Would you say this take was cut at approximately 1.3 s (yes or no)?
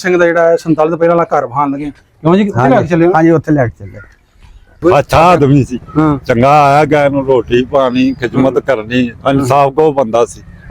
no